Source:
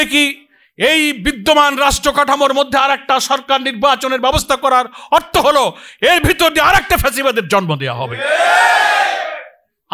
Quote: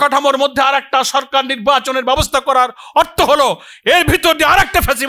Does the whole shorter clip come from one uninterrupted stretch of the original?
yes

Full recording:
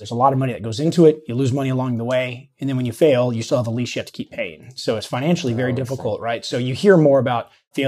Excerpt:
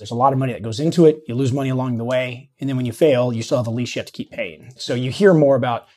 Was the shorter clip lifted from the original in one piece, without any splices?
no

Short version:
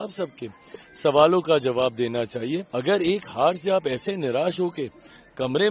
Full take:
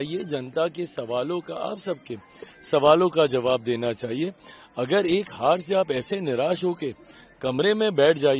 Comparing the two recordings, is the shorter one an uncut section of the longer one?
no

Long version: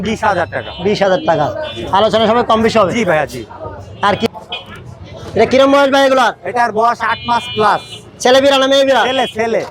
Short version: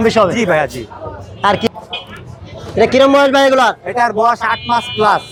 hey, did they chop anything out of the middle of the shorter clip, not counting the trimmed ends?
no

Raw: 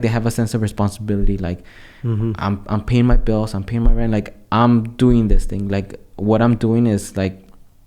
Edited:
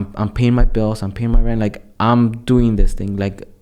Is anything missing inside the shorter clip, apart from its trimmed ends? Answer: no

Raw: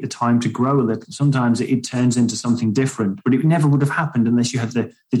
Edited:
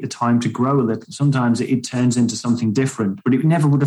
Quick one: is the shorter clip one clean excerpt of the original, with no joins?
yes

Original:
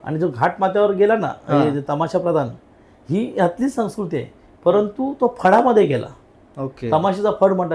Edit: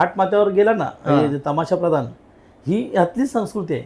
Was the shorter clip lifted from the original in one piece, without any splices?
yes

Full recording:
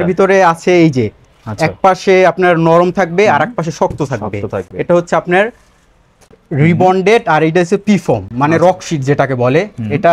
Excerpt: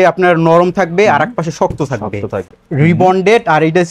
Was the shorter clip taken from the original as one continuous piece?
no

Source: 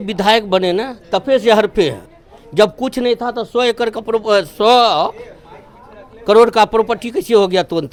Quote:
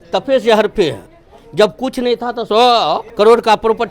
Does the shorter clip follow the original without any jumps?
no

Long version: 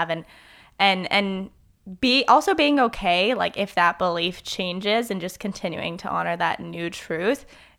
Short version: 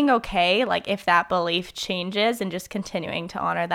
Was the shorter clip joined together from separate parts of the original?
no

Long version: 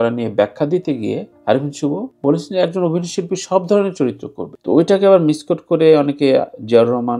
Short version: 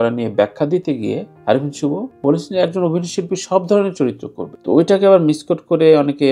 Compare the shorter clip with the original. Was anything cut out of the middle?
no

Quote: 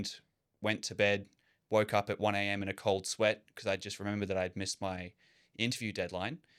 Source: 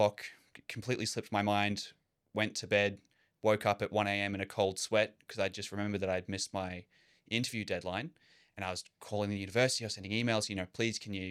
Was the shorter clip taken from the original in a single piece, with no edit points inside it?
yes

